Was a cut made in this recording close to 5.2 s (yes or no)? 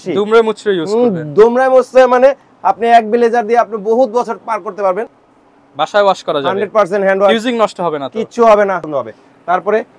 yes